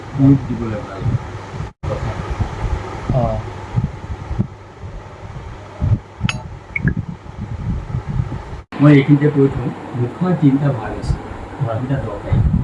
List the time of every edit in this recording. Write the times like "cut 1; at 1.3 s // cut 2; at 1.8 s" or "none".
cut 1; at 1.8 s // cut 2; at 8.7 s